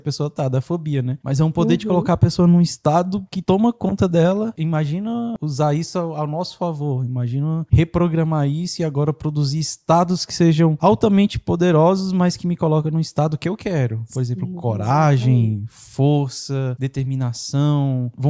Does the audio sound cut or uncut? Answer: cut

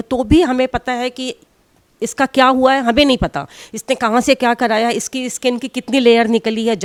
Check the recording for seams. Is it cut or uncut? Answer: uncut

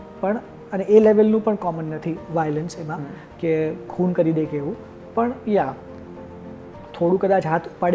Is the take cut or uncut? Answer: uncut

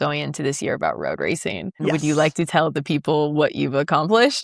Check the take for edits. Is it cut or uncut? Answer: cut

